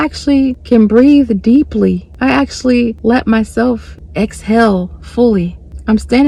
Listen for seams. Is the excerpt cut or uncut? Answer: uncut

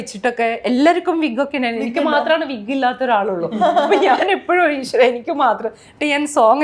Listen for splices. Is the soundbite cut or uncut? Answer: uncut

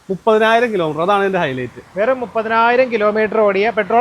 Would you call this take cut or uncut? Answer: uncut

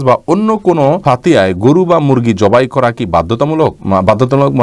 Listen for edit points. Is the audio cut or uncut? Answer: cut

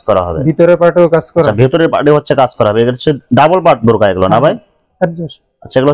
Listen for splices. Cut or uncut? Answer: uncut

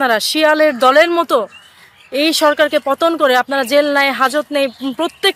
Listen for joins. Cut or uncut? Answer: uncut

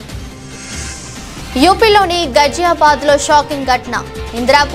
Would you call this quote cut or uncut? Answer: uncut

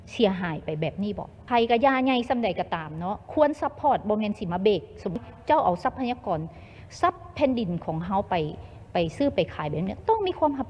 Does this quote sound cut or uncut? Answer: cut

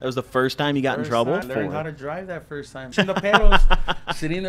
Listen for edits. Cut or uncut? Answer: cut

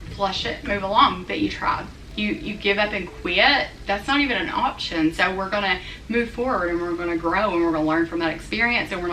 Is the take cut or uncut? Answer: cut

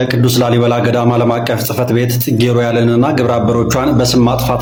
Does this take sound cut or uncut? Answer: uncut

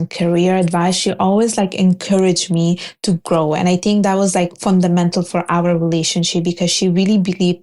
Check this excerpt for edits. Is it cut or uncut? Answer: uncut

